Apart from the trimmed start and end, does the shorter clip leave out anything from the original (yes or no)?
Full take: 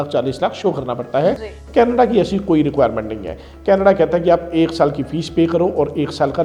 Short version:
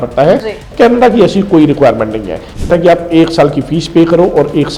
yes